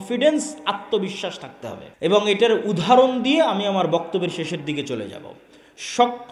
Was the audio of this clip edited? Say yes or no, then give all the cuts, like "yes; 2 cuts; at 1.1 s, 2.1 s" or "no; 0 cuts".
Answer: yes; 1 cut; at 1.8 s